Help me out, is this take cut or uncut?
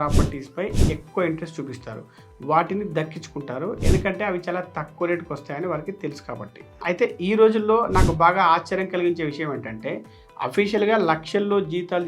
cut